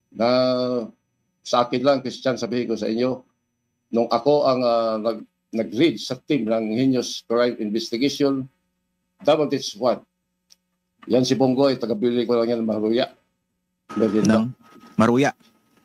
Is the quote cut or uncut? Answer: uncut